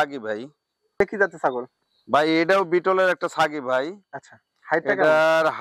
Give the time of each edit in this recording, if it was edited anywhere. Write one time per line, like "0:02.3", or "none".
0:01.0